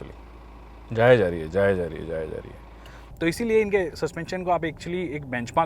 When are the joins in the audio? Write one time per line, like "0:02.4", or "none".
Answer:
0:03.1